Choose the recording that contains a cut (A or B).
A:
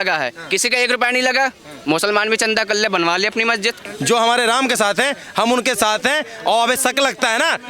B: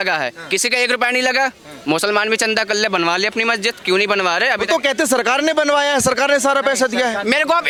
A